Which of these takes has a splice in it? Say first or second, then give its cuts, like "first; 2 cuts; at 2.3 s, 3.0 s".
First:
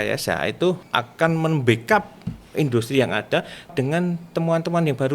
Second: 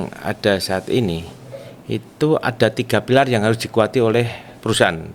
first; 2 cuts; at 0.8 s, 3.7 s